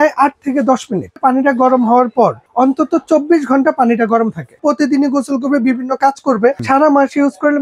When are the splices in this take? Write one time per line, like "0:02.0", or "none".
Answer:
0:01.2
0:04.6
0:06.6